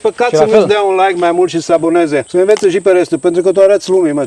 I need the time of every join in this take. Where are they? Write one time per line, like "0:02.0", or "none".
0:02.3